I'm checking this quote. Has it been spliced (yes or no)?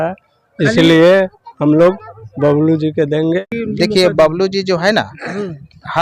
yes